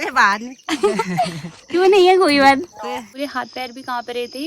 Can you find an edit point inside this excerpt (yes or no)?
yes